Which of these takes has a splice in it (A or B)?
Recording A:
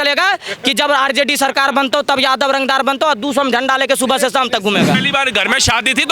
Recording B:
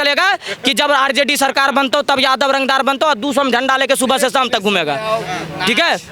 A